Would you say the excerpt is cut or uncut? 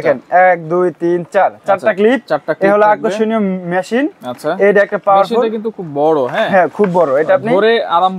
uncut